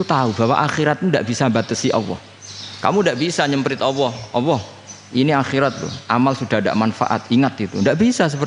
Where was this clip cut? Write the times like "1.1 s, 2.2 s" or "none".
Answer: none